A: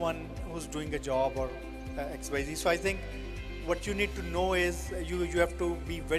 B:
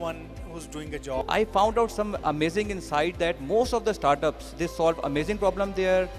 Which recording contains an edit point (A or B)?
B